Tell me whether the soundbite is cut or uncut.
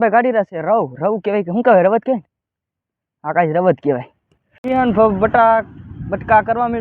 cut